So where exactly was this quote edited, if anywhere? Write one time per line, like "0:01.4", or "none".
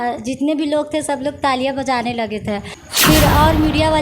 0:02.8